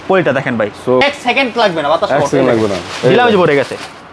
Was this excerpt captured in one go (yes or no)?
no